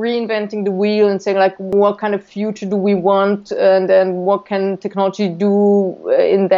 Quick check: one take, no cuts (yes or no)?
no